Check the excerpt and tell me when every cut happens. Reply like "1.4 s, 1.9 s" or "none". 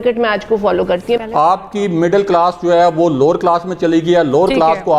1.3 s